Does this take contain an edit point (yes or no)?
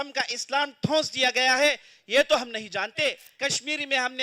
yes